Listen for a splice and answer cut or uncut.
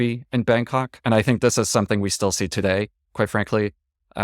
cut